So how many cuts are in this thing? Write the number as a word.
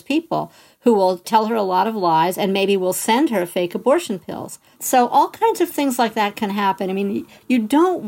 two